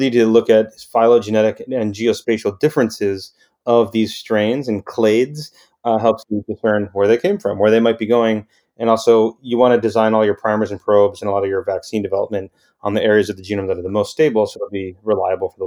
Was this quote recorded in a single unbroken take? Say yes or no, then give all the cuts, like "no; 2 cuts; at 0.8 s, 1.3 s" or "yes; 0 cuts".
yes; 0 cuts